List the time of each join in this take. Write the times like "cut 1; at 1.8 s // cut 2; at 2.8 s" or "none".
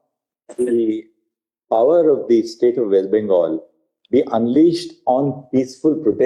none